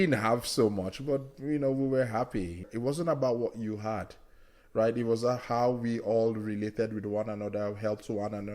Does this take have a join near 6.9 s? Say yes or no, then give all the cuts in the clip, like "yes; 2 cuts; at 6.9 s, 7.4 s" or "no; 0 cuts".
no; 1 cut; at 2.7 s